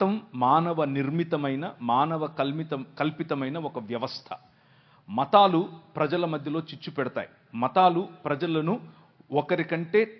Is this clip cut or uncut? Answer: uncut